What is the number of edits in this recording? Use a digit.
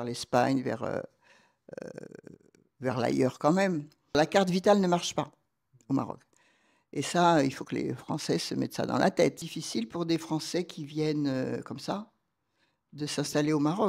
2